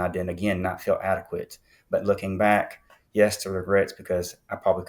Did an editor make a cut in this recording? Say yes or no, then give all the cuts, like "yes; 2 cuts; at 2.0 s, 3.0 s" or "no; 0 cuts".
no; 0 cuts